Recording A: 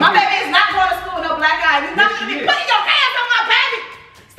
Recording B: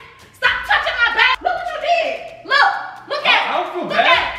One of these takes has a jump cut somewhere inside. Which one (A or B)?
B